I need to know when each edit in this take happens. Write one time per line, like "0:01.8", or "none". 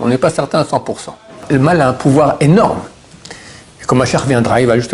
0:01.4